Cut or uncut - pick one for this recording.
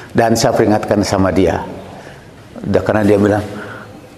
cut